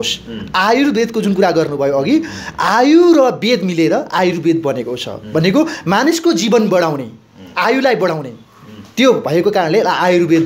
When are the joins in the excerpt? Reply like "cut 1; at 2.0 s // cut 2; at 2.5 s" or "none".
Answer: none